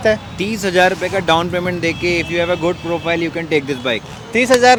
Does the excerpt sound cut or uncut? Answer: uncut